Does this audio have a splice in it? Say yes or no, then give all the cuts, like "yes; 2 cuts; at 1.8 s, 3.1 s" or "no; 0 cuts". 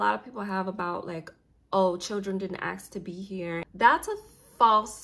yes; 1 cut; at 3.7 s